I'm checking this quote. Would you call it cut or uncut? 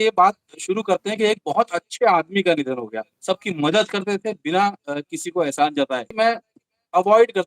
cut